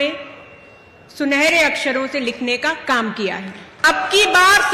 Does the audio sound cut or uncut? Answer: cut